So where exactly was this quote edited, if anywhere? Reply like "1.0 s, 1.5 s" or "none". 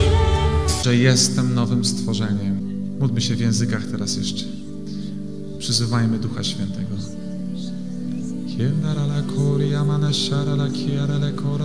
none

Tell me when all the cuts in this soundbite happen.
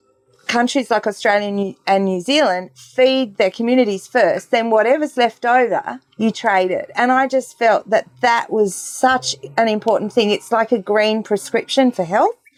none

